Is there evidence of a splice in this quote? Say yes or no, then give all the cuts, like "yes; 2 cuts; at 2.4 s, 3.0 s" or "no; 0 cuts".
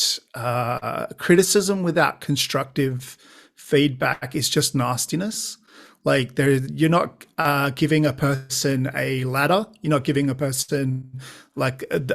no; 0 cuts